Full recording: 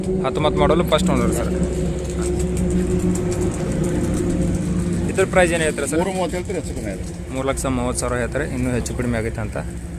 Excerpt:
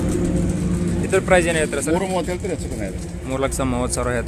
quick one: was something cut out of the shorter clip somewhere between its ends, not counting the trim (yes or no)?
no